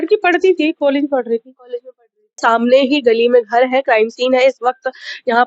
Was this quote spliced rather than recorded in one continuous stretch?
yes; 1 cut; at 2.4 s

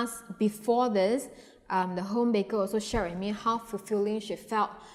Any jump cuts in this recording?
no; 0 cuts

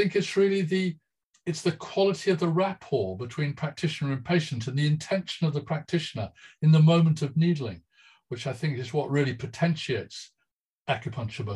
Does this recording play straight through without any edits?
yes; 0 cuts

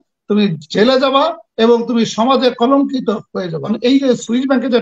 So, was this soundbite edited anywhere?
yes; 1 cut; at 3.7 s

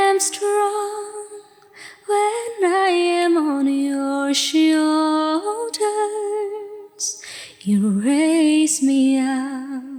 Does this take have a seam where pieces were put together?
no; 0 cuts

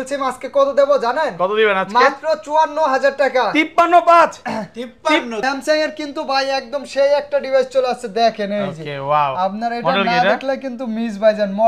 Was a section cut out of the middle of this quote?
yes; 1 cut; at 5.4 s

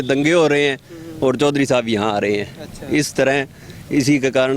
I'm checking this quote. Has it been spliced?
no; 0 cuts

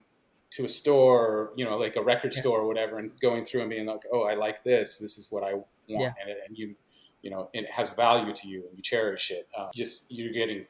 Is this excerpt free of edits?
no; 1 cut; at 9.7 s

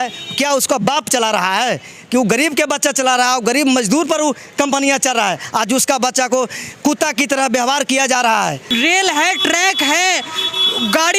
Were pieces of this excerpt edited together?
yes; 1 cut; at 8.6 s

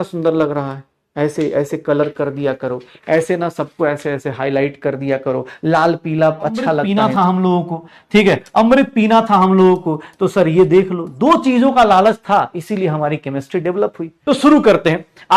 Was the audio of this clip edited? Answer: yes; 2 cuts; at 6.9 s, 14.1 s

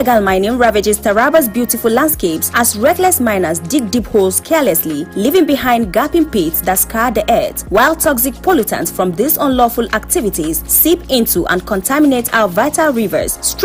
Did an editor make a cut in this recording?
no; 0 cuts

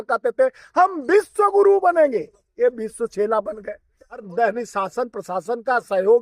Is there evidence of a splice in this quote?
yes; 1 cut; at 4.3 s

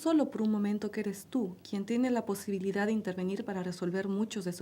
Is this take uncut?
no; 1 cut; at 2.8 s

